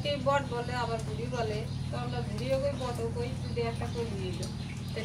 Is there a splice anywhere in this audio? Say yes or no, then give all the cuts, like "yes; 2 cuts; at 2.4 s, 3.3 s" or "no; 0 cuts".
no; 0 cuts